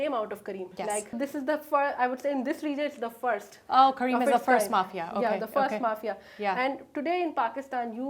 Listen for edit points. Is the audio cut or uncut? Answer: cut